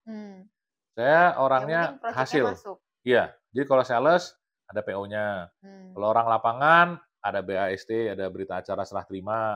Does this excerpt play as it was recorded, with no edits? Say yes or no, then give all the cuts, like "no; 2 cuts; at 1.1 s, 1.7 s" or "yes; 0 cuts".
yes; 0 cuts